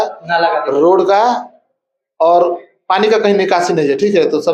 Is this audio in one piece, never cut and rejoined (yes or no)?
yes